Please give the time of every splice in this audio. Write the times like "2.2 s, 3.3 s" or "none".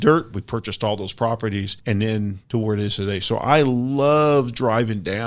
1.7 s, 2.4 s